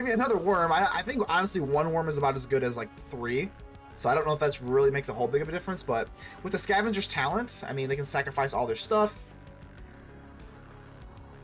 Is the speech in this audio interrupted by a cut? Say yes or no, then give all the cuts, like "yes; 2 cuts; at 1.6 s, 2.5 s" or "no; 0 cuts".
no; 0 cuts